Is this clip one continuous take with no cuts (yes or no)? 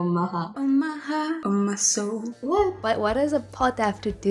no